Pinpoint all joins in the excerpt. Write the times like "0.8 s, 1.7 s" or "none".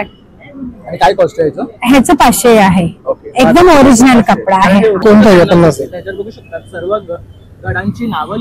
5.0 s